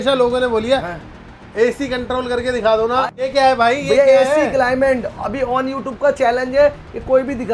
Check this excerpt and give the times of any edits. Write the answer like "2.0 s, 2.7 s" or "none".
3.2 s